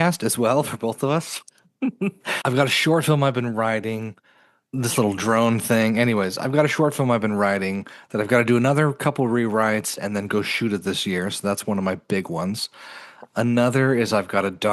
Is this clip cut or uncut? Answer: uncut